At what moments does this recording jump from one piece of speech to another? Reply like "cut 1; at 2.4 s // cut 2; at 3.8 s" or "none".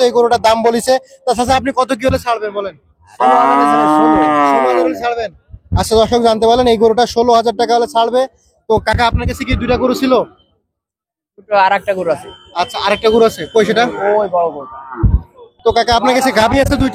none